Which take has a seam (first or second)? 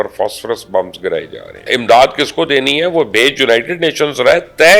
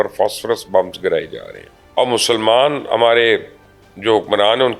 first